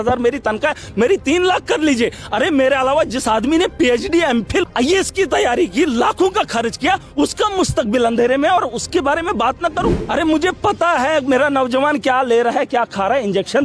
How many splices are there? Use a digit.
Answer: 2